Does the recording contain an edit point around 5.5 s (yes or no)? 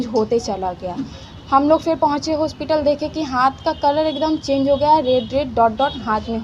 no